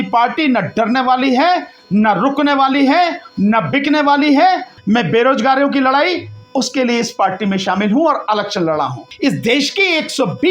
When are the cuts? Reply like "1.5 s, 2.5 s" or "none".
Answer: 4.7 s, 9.1 s